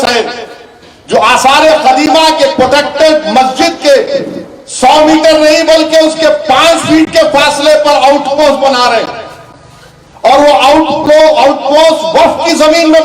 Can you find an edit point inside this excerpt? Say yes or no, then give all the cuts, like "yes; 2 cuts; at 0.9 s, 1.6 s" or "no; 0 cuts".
no; 0 cuts